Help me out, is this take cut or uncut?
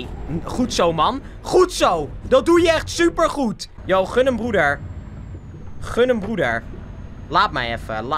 uncut